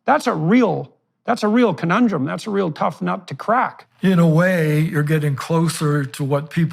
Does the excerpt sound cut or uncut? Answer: cut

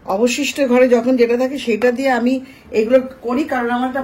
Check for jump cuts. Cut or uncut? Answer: uncut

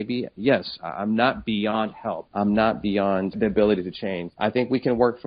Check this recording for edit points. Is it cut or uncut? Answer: cut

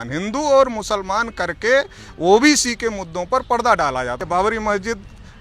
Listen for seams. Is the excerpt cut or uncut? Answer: cut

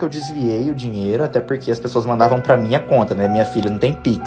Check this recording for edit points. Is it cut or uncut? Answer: uncut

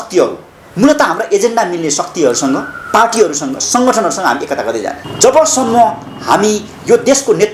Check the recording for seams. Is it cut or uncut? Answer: cut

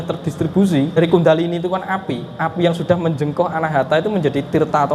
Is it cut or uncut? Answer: cut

